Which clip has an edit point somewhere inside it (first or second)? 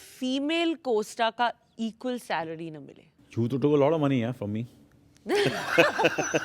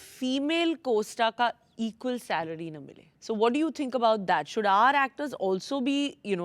first